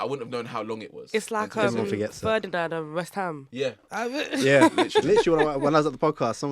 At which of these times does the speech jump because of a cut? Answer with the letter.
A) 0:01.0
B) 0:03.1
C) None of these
C